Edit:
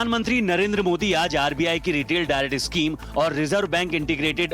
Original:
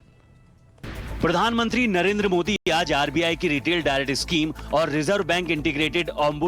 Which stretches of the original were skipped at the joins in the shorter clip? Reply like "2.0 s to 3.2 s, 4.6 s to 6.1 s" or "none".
2.5 s to 2.7 s